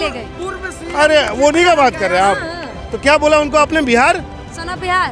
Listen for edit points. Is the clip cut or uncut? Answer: uncut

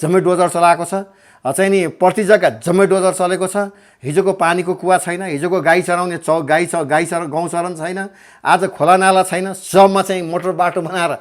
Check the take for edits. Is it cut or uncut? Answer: uncut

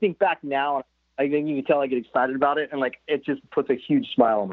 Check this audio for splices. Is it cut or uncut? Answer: uncut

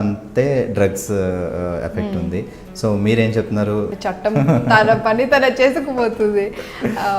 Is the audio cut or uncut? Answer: cut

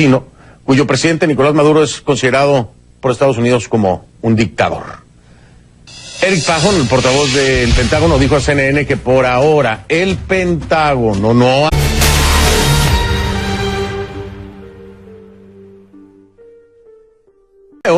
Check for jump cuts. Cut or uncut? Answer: uncut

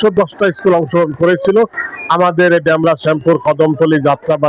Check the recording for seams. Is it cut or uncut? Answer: uncut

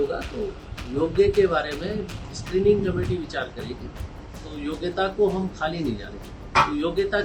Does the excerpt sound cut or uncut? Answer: uncut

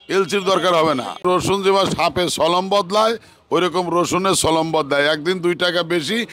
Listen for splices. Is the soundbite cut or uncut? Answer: cut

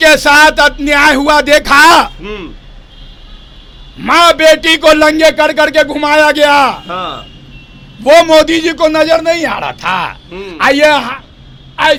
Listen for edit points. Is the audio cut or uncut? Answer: uncut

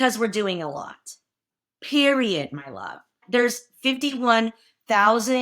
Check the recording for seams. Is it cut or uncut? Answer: cut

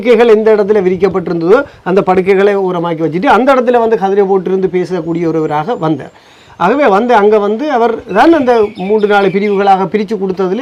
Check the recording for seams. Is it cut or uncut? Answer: uncut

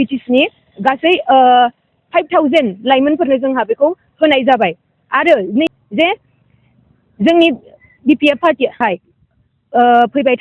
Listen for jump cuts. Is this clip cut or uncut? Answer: cut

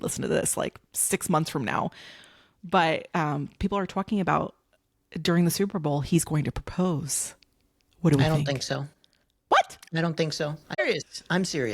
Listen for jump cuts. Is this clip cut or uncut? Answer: cut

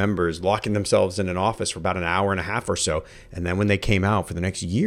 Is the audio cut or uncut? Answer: uncut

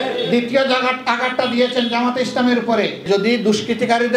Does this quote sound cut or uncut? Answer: cut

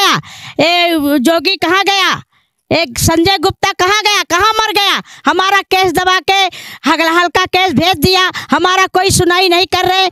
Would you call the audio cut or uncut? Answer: uncut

